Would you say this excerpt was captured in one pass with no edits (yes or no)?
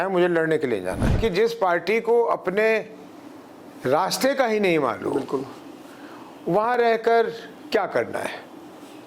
no